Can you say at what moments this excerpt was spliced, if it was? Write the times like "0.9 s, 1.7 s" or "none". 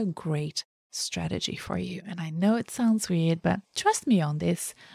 none